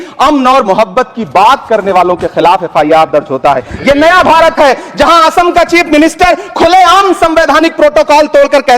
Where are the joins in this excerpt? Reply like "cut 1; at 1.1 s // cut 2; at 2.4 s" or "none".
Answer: none